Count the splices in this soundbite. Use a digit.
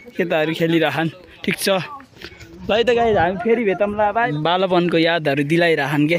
0